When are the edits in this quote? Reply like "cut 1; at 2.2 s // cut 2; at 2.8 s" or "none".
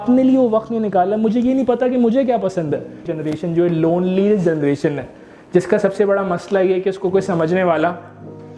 cut 1; at 3.1 s

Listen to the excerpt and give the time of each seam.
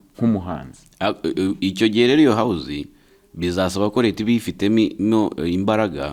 none

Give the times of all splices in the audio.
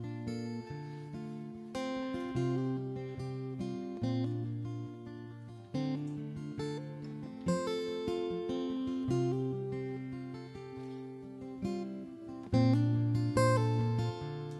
none

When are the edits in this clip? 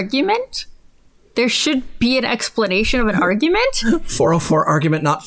none

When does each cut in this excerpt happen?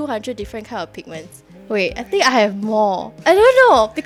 none

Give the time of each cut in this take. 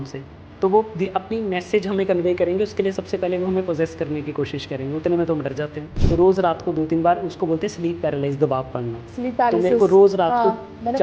cut 1; at 6.0 s

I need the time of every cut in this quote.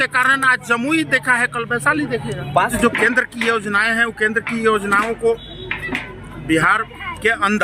cut 1; at 2.7 s

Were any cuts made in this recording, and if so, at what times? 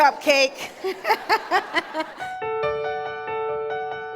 cut 1; at 2.3 s

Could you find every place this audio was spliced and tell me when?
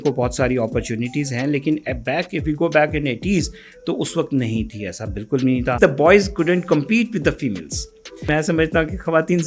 cut 1; at 5.8 s // cut 2; at 8.3 s

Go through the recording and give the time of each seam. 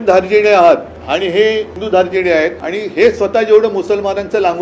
cut 1; at 0.9 s // cut 2; at 1.8 s // cut 3; at 2.6 s

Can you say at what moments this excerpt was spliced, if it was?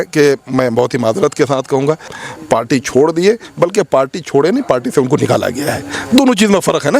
cut 1; at 2.2 s

